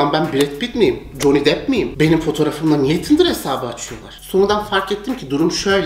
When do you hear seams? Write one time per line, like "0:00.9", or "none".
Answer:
none